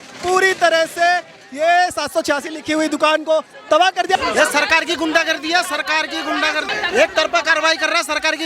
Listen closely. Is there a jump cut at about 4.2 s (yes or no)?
yes